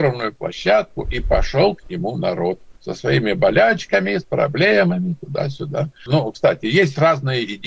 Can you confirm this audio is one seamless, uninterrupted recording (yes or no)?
no